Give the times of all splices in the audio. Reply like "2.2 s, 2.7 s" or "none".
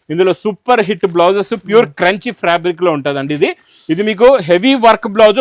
none